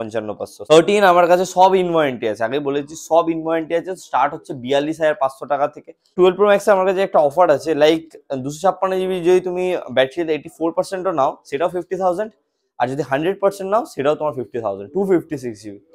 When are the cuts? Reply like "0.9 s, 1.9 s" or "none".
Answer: 0.7 s, 6.1 s

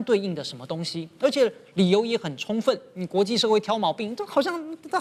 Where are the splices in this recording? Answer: none

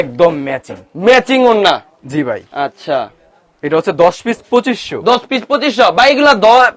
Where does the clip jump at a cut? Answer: none

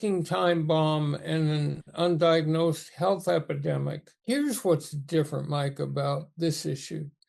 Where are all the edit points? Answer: 4.1 s

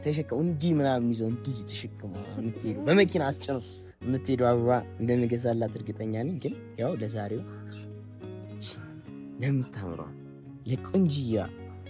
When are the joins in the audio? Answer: none

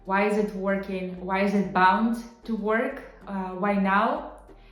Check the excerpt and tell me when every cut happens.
none

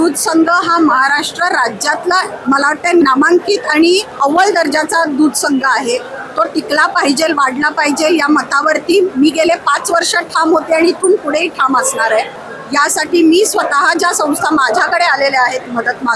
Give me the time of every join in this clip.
2.3 s, 4.1 s, 12.4 s

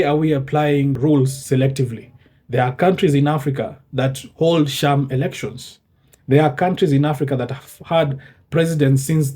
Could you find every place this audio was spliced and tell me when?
1.0 s

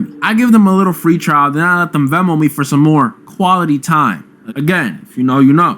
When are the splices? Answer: 1.1 s

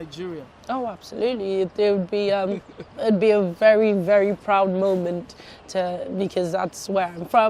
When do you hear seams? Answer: none

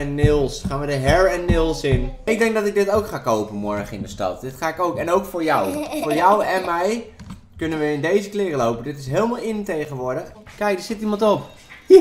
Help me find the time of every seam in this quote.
2.1 s, 10.4 s

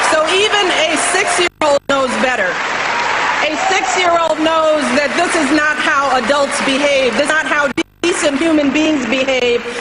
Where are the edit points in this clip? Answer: 1.8 s

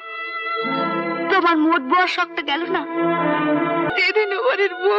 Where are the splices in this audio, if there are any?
3.9 s

